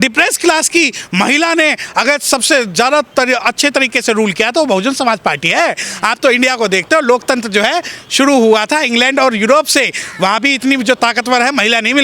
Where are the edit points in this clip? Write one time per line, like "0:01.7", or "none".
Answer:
none